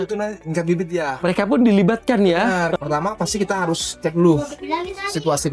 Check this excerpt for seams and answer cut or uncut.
cut